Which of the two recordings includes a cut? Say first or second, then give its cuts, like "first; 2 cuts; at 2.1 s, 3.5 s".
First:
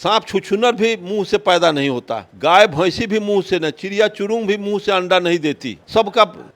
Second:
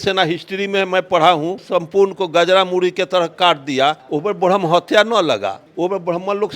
second; 2 cuts; at 1.6 s, 4.0 s